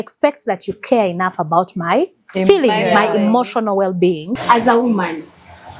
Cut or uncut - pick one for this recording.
cut